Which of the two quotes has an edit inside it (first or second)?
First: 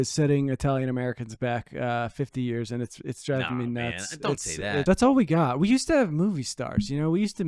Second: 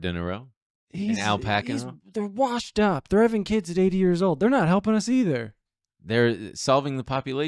first